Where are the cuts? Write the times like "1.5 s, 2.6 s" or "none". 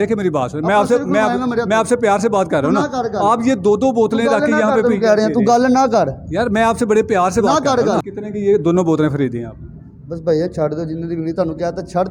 8.2 s